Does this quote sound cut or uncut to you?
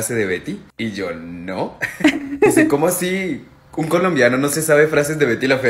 uncut